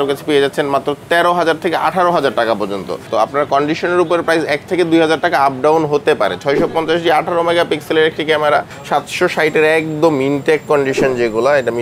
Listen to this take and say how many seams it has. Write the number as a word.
two